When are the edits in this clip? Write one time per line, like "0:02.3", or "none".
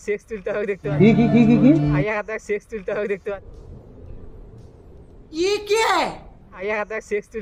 none